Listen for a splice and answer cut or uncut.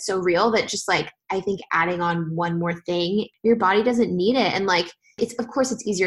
cut